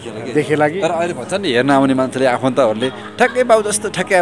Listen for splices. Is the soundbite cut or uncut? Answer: uncut